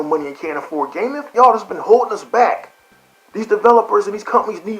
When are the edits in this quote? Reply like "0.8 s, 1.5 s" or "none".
1.3 s